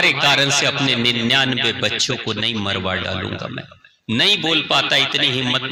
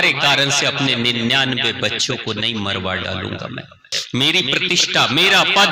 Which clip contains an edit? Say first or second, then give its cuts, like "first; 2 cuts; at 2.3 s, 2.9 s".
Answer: second; 1 cut; at 3.9 s